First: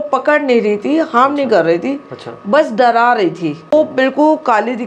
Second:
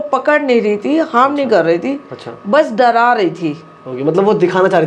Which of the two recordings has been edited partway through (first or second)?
first